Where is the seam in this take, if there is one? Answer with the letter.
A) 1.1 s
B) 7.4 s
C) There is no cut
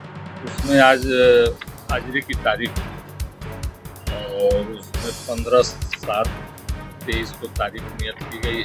C